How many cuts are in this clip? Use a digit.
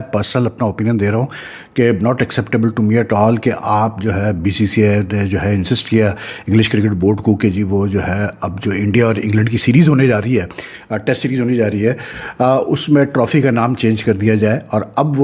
0